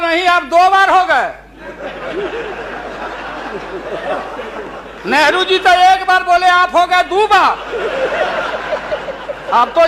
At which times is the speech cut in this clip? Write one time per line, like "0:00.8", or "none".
none